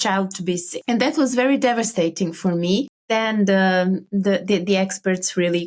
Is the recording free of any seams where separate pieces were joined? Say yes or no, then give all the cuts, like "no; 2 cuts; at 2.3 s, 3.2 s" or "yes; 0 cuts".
no; 1 cut; at 3.1 s